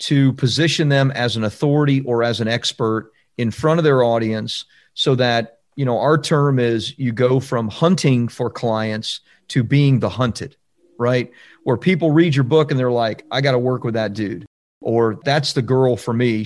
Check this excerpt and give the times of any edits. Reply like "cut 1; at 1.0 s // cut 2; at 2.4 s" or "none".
cut 1; at 15.2 s